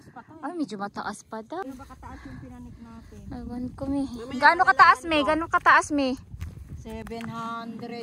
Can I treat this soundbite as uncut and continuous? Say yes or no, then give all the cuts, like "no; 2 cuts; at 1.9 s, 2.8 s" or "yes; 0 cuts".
no; 1 cut; at 1.6 s